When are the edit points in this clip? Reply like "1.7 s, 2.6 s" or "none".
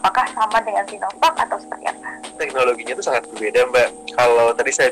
2.5 s